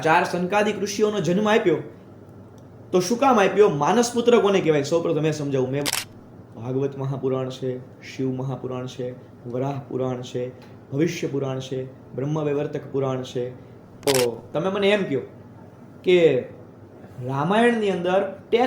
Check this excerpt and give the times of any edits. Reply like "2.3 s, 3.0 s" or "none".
5.9 s, 14.1 s